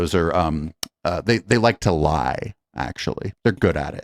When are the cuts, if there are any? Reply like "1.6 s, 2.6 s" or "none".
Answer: none